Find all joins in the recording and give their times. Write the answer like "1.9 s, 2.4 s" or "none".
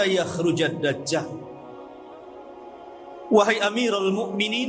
none